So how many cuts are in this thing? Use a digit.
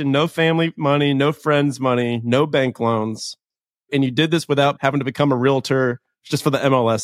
1